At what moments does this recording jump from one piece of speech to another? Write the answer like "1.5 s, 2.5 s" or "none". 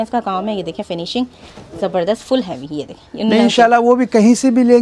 3.0 s